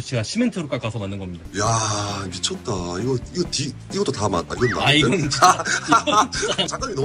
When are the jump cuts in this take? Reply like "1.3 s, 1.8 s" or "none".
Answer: none

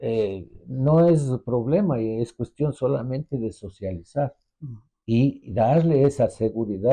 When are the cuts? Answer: none

